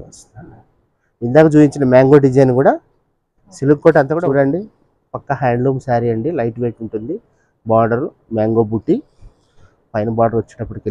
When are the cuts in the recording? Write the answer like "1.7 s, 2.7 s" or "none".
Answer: 4.1 s